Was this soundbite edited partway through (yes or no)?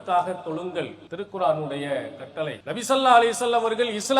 yes